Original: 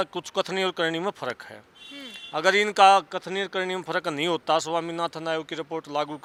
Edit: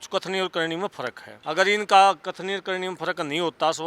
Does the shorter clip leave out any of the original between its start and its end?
yes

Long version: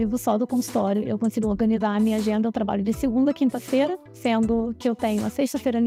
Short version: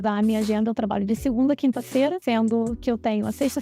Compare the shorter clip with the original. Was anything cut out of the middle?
yes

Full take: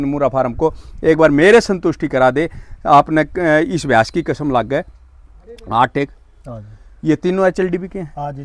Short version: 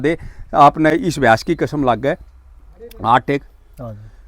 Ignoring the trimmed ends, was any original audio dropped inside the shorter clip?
yes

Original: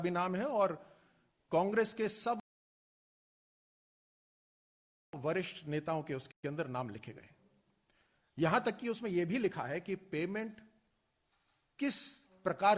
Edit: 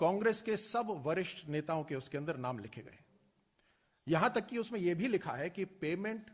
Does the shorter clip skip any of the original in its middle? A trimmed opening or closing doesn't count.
yes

